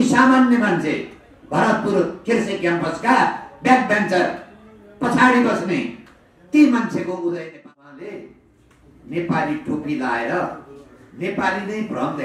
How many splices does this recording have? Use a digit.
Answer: 1